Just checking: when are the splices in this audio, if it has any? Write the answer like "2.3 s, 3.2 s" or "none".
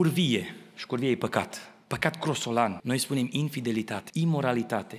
2.8 s, 4.0 s